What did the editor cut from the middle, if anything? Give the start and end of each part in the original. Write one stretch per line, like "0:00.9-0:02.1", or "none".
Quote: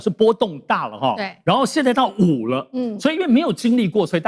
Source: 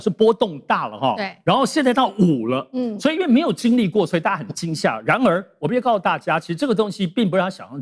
none